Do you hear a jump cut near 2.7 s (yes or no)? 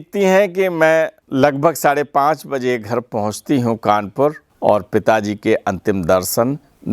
no